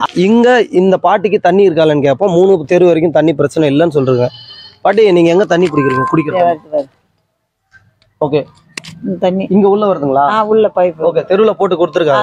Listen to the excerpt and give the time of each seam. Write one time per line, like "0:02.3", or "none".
none